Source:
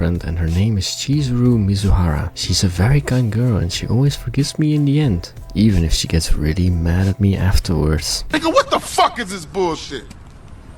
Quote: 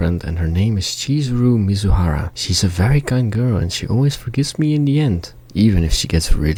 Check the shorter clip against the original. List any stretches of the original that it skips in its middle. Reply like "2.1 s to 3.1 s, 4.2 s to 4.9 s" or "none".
none